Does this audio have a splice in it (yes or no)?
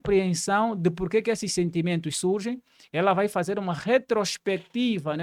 no